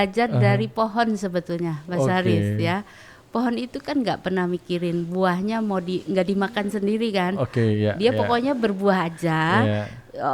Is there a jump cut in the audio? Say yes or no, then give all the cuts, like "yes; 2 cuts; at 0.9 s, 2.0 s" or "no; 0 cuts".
no; 0 cuts